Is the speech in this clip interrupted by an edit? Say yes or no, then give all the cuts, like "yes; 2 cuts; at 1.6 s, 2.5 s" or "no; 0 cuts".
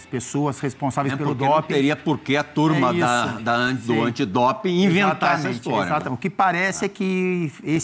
no; 0 cuts